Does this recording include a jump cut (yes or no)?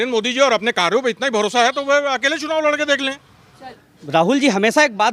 yes